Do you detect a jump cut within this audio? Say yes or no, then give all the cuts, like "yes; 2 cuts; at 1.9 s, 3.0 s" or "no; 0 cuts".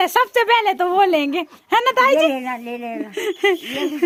no; 0 cuts